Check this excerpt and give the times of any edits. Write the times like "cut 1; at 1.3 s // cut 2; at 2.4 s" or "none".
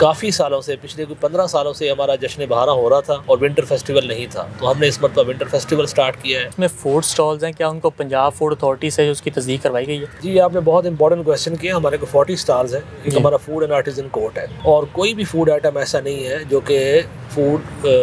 cut 1; at 3.2 s // cut 2; at 6.5 s // cut 3; at 10.1 s // cut 4; at 14.5 s

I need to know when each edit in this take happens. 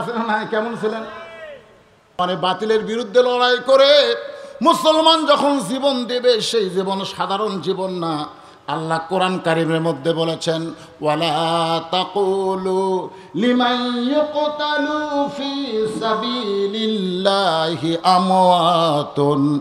cut 1; at 2.0 s

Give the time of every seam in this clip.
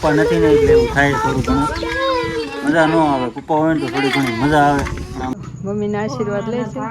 cut 1; at 5.5 s

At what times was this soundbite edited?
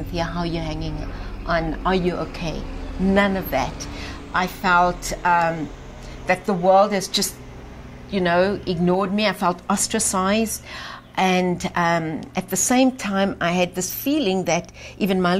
none

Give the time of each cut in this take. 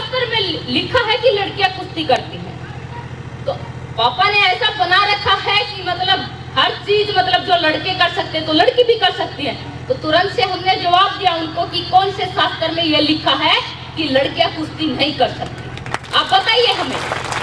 none

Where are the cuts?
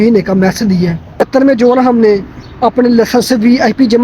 cut 1; at 1.3 s

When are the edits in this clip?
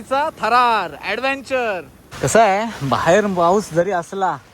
cut 1; at 2.0 s

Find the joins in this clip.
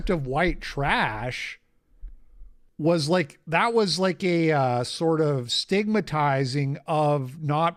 none

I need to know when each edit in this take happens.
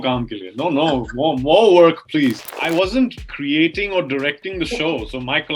cut 1; at 2.5 s // cut 2; at 3.3 s

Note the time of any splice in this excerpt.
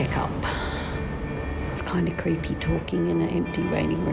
cut 1; at 1.0 s

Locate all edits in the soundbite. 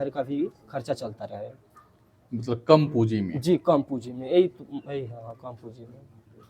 none

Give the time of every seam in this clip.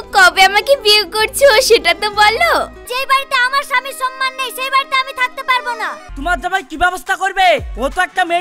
cut 1; at 2.8 s // cut 2; at 6.1 s

